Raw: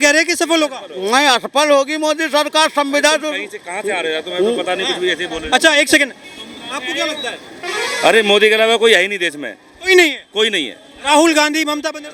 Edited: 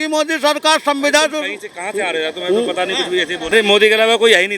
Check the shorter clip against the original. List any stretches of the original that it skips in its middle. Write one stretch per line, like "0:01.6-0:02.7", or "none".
0:05.4-0:08.1